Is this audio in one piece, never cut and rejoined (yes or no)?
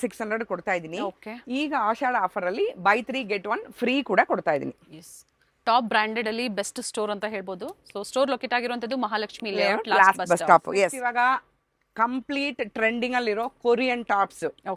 yes